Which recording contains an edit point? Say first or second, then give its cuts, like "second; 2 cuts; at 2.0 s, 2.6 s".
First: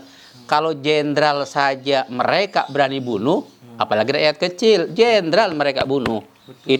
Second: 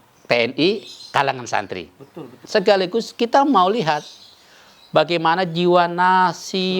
second; 1 cut; at 2.4 s